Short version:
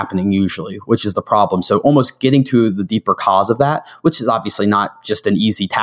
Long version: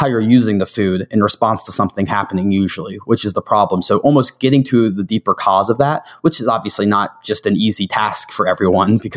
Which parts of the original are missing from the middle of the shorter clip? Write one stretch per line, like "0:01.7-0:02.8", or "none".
none